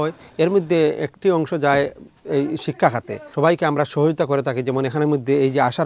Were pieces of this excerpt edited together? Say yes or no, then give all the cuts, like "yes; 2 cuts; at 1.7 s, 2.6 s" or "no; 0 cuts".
yes; 1 cut; at 3.2 s